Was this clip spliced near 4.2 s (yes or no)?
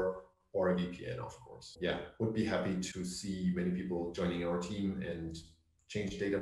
no